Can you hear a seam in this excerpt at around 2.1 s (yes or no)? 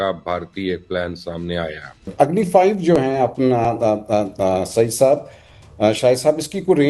yes